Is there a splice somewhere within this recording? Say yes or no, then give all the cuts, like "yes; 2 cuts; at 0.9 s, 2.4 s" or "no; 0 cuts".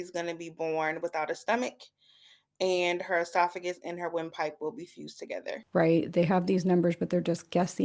yes; 1 cut; at 5.5 s